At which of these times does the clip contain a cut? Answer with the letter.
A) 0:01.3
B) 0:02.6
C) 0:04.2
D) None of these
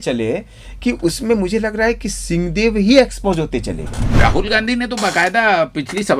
C